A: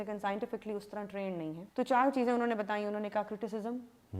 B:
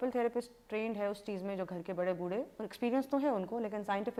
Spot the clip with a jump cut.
A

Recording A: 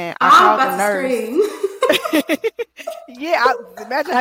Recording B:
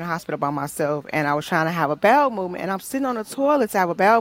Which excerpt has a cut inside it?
A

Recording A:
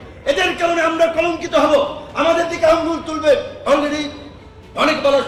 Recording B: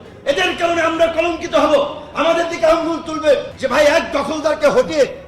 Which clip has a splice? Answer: B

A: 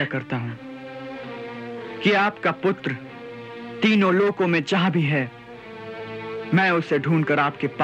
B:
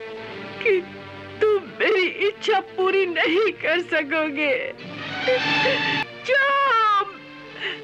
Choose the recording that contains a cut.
B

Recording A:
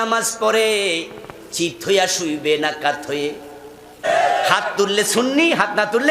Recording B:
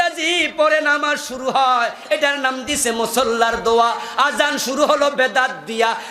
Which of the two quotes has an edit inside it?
A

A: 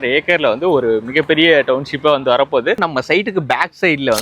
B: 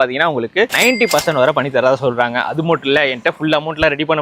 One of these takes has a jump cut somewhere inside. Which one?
A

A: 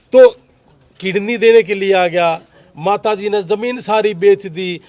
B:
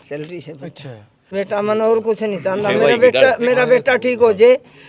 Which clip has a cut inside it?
B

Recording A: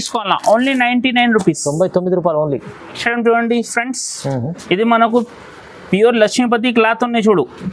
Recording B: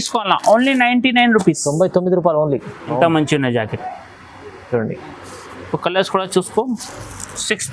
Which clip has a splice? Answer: B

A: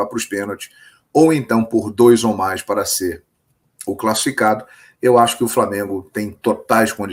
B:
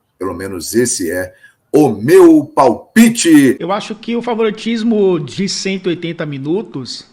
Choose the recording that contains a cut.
B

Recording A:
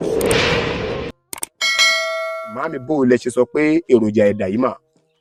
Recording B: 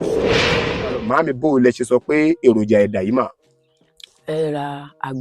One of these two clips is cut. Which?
B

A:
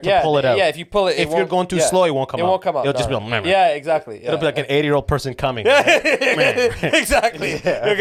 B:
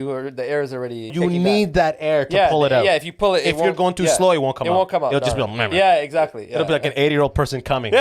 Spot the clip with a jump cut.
B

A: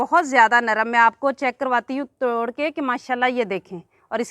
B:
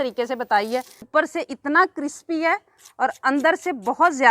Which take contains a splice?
B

